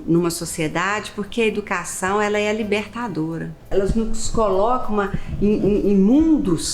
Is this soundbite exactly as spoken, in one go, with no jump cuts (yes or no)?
no